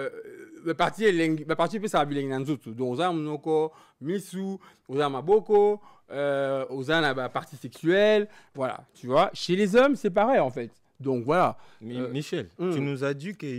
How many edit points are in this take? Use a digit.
0